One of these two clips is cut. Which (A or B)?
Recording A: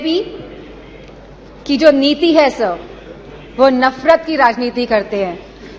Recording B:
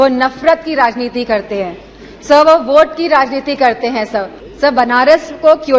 B